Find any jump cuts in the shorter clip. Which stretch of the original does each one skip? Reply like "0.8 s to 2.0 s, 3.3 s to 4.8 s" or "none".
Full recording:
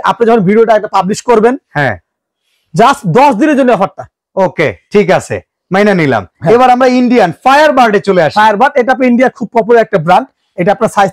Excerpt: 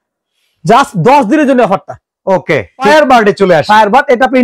5.0 s to 7.5 s

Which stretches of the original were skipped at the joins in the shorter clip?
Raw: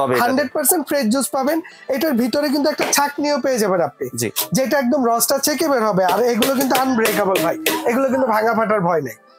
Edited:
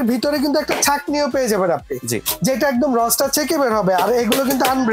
none

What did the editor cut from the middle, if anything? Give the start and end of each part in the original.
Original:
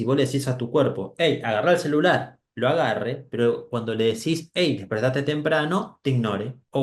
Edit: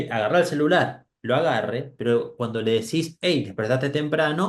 none

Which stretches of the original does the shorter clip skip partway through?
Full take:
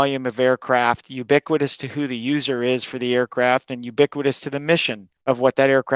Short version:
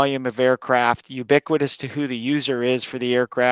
none

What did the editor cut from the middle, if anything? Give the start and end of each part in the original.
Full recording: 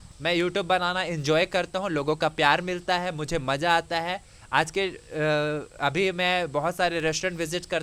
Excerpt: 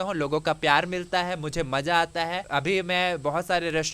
4.2 s to 5.7 s

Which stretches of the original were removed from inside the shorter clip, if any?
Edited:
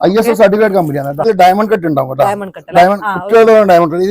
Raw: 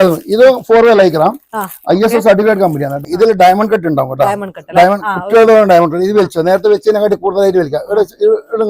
3.1 s to 3.3 s

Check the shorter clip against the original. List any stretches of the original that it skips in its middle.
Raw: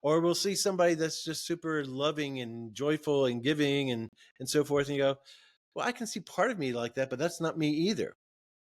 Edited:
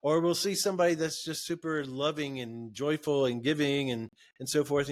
none

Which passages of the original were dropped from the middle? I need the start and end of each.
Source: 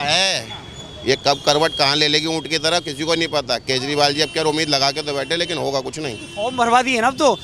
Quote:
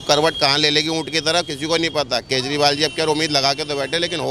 none

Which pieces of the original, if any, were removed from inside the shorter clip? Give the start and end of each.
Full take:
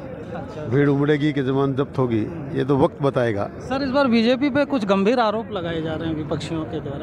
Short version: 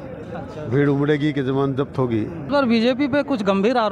2.5 s to 3.9 s

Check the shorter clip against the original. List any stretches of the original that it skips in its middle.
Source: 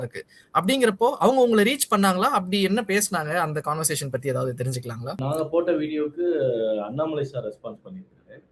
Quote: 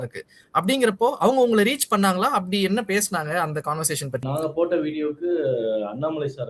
4.2 s to 5.2 s

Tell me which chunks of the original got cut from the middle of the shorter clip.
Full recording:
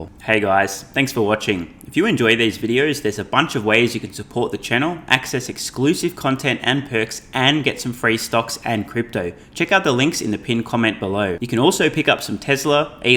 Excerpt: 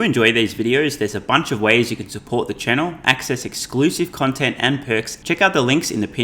7.2 s to 9.4 s

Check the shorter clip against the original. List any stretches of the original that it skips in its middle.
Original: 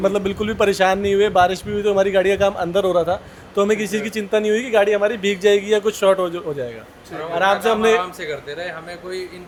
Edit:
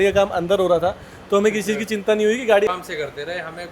4.9 s to 8.0 s

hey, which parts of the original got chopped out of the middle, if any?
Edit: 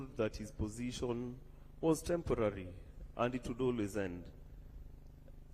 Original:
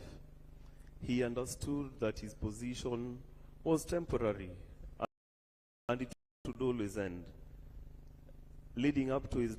5.4 s to 6.6 s

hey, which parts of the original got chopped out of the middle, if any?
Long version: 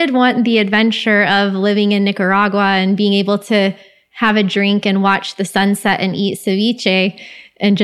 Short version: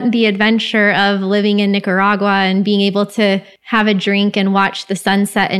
3.9 s to 4.0 s

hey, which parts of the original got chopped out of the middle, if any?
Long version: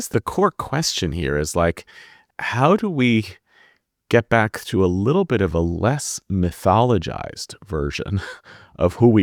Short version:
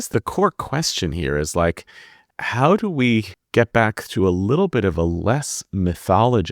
3.4 s to 3.9 s

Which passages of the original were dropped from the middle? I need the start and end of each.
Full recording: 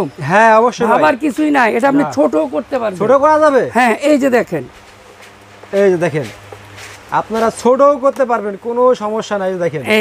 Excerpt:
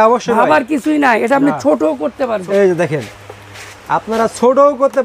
2.9 s to 5.6 s

